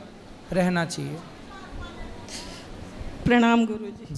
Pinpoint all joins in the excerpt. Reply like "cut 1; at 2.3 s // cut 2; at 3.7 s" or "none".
none